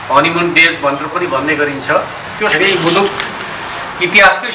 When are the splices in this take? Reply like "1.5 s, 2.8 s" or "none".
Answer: 2.5 s